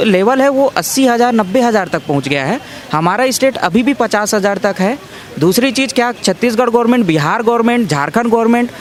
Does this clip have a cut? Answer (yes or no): no